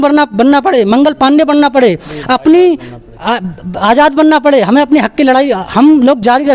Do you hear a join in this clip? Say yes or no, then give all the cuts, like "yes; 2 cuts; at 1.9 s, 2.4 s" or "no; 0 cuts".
no; 0 cuts